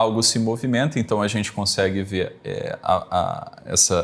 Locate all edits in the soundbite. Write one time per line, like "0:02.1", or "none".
none